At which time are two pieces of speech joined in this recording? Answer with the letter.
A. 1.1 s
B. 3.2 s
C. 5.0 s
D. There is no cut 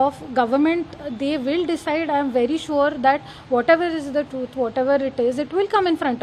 D